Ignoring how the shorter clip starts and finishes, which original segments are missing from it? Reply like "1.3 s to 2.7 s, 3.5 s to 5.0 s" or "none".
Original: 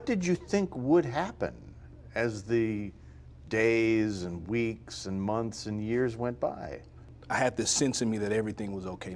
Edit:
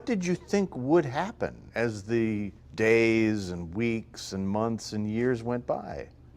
1.6 s to 2.0 s, 3.0 s to 3.3 s